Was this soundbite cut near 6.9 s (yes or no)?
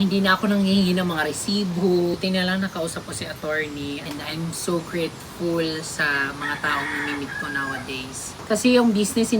no